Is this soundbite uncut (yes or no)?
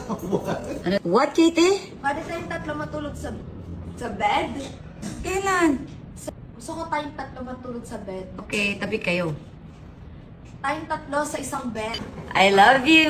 no